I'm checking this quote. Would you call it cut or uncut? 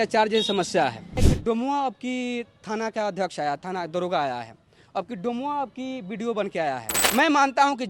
cut